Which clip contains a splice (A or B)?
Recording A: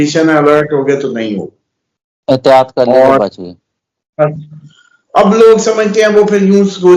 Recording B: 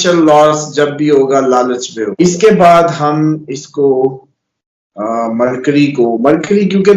B